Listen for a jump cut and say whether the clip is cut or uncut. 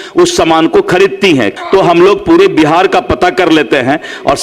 cut